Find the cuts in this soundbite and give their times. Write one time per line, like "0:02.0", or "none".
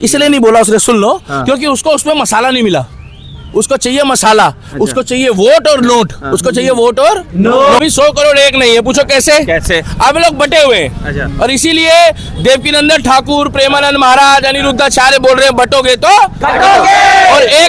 0:07.8